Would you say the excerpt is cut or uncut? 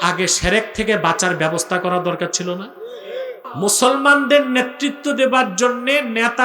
cut